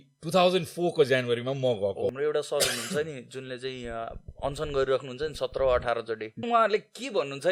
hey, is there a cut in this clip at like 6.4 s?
yes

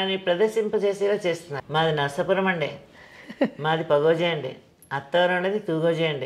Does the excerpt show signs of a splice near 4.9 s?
no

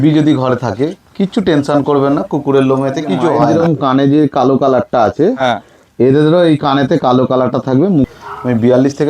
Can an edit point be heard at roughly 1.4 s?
no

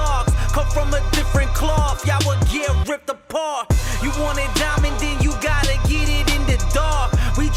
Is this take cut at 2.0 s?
no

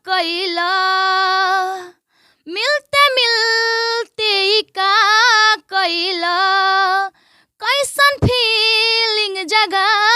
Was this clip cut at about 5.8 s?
no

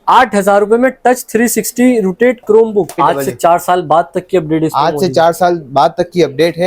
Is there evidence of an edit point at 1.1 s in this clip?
no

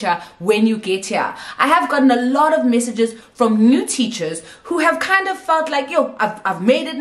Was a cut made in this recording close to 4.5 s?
no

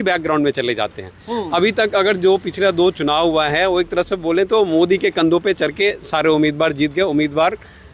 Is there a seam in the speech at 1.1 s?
no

